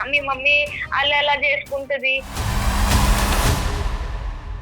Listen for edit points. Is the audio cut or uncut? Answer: cut